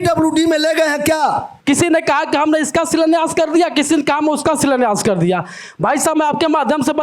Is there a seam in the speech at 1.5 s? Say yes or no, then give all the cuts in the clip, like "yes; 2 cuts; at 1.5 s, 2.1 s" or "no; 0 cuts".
yes; 1 cut; at 1.5 s